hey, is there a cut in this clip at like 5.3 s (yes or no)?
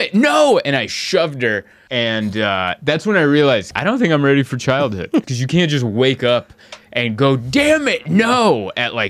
yes